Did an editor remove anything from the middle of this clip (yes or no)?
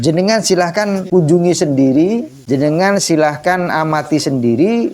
yes